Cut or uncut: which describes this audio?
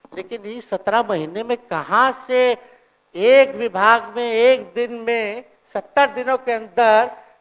uncut